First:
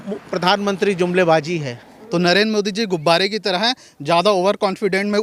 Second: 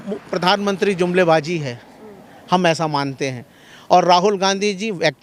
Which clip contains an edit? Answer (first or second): first